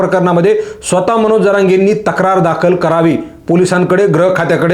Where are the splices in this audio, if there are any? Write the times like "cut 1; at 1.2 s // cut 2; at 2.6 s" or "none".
none